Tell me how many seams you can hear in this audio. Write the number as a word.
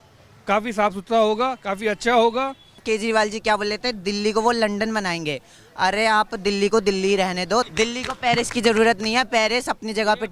two